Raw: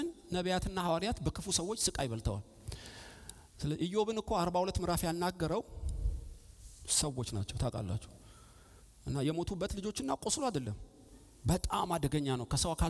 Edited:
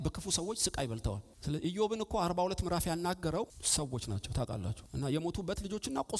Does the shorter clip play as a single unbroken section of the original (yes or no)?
no